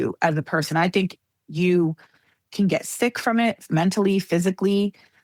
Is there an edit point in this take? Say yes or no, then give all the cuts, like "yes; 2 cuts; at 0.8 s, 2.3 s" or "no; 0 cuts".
no; 0 cuts